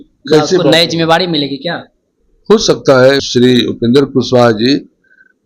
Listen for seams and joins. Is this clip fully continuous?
no; 1 cut; at 3.2 s

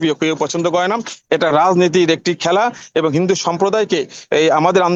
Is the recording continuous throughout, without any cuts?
yes; 0 cuts

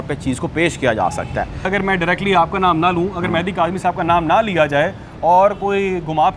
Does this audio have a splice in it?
yes; 1 cut; at 1.7 s

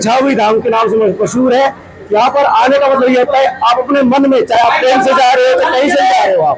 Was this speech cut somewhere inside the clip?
no; 0 cuts

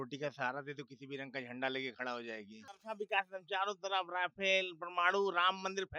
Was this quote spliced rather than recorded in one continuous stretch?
yes; 1 cut; at 2.8 s

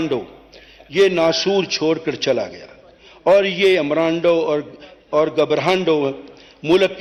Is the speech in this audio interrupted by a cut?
no; 0 cuts

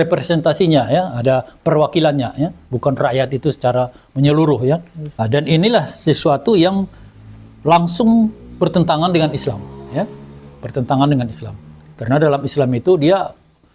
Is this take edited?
yes; 1 cut; at 5.1 s

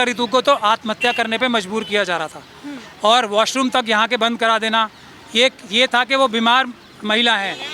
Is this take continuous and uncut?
yes; 0 cuts

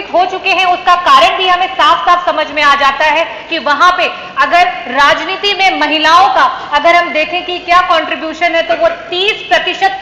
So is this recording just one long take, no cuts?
yes; 0 cuts

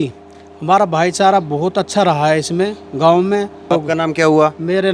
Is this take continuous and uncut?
no; 1 cut; at 3.7 s

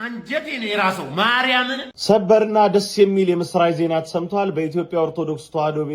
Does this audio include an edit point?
yes; 1 cut; at 1.9 s

